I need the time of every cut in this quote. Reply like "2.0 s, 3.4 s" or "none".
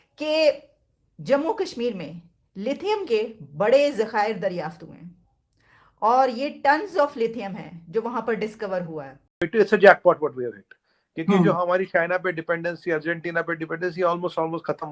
9.5 s